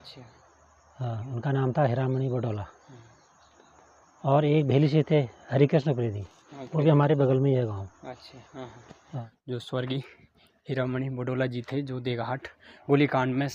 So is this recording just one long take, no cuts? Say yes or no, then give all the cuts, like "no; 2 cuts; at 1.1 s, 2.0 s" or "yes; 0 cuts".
no; 1 cut; at 9.3 s